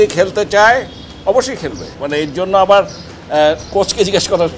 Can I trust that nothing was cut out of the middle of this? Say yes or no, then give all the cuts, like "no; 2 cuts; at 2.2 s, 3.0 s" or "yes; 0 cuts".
no; 1 cut; at 1.9 s